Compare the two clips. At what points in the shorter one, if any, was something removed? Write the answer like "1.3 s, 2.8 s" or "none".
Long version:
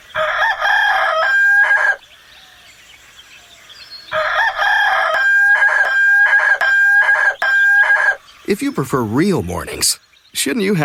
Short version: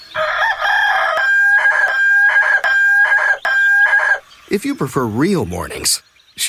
1.2 s